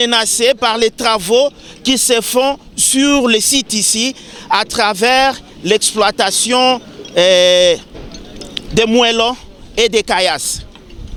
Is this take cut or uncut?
uncut